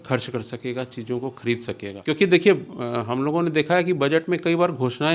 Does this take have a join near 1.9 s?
yes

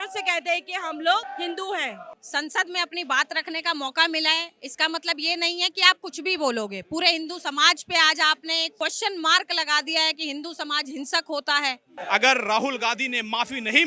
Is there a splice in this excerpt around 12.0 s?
yes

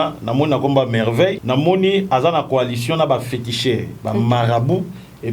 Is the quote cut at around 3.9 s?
yes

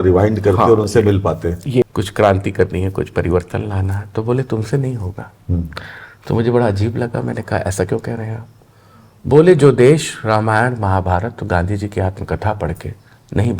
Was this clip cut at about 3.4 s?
no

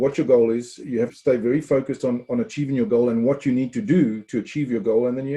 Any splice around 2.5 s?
no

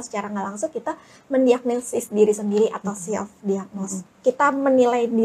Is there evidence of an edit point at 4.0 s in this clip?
yes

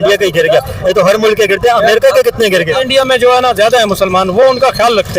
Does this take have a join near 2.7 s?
yes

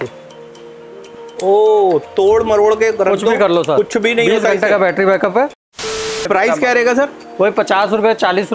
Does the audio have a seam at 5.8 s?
yes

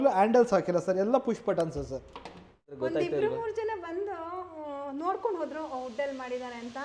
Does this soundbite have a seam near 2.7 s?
yes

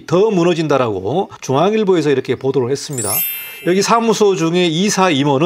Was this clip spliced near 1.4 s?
yes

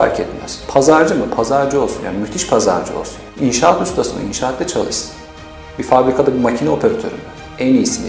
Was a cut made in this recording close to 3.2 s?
yes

